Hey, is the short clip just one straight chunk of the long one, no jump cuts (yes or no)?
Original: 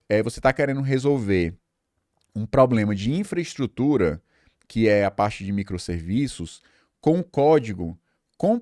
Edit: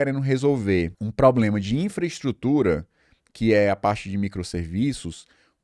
no